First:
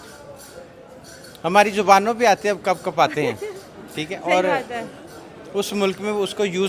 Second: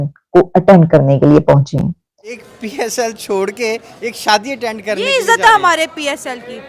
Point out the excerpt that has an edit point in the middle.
second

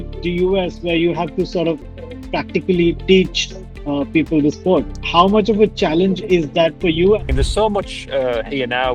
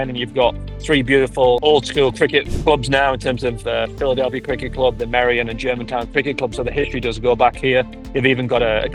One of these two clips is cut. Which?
first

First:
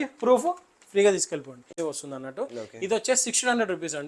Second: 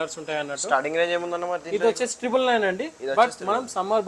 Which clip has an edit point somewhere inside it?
first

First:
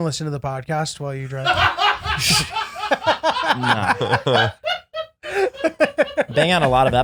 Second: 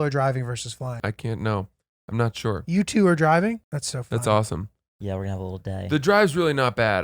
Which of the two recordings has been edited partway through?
second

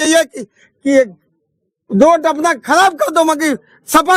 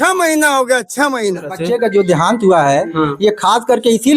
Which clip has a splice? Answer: second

